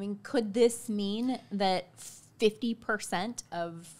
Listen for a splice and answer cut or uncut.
uncut